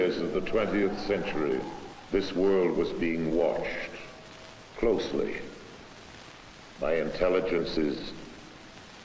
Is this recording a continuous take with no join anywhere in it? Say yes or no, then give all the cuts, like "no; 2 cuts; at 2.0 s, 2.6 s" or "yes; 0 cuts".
yes; 0 cuts